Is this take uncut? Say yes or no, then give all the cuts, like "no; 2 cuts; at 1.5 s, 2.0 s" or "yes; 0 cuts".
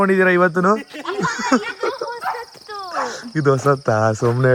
yes; 0 cuts